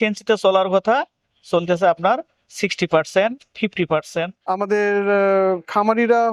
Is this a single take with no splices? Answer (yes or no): no